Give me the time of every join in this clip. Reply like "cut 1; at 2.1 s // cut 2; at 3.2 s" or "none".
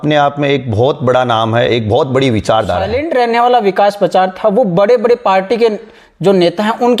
cut 1; at 3.0 s